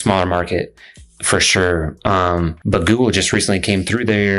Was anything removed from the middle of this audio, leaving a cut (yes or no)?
yes